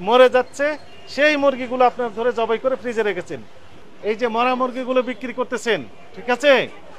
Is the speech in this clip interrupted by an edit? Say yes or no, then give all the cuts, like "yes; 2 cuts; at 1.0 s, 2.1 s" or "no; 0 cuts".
yes; 1 cut; at 3.8 s